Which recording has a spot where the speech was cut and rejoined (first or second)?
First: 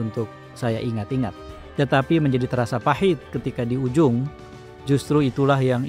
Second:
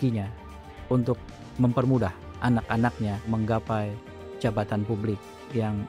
second